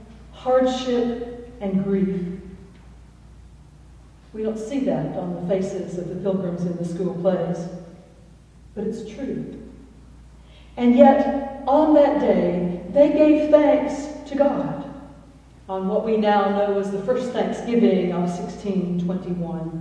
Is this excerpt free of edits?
yes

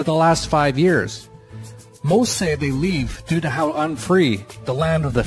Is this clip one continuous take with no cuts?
no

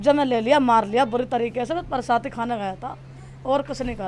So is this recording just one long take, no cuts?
yes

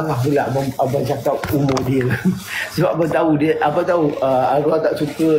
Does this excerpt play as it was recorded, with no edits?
yes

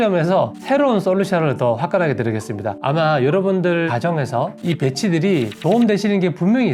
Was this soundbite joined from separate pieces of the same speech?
yes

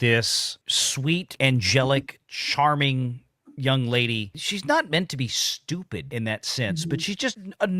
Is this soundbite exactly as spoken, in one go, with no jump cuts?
no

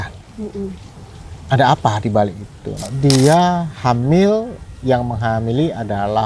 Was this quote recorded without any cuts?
no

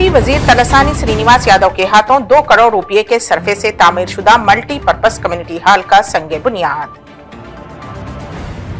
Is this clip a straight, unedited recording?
yes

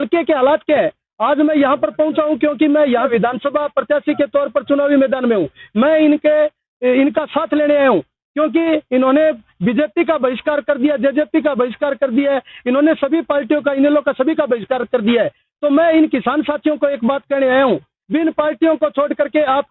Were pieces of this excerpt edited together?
yes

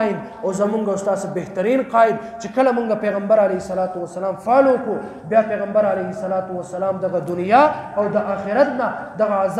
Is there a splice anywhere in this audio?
no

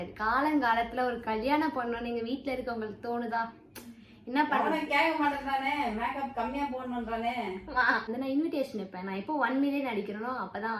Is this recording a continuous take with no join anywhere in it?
no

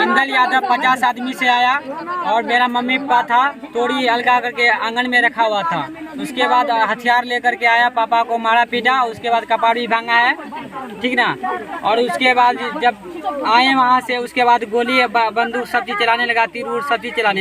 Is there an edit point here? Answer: no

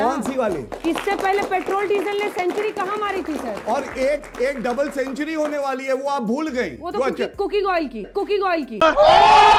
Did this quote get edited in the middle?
no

